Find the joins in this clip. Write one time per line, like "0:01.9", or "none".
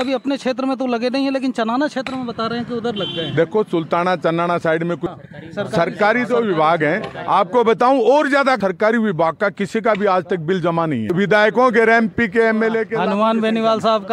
0:05.1
0:08.6
0:11.1